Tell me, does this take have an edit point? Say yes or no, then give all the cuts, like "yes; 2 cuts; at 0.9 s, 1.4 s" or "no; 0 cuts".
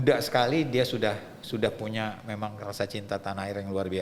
no; 0 cuts